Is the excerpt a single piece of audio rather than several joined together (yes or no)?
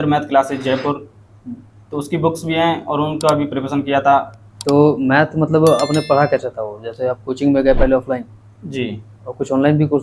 yes